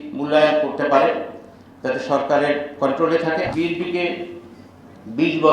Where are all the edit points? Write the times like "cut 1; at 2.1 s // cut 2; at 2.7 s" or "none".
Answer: cut 1; at 3.5 s